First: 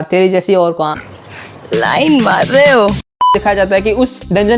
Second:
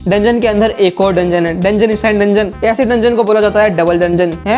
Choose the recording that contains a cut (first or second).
first